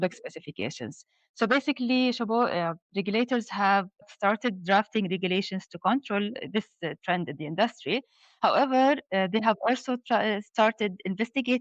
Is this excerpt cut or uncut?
cut